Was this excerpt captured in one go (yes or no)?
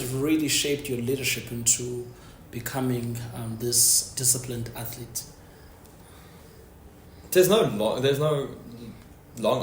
yes